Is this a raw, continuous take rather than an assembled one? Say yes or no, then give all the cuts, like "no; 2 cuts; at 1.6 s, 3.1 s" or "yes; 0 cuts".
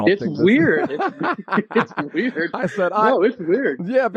yes; 0 cuts